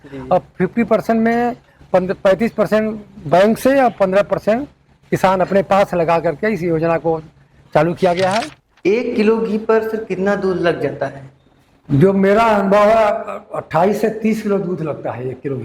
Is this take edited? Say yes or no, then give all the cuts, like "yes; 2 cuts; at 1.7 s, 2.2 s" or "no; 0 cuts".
yes; 1 cut; at 8.6 s